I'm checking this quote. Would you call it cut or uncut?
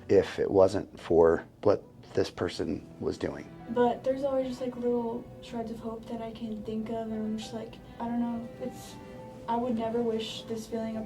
cut